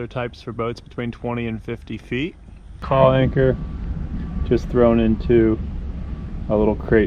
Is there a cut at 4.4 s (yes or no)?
no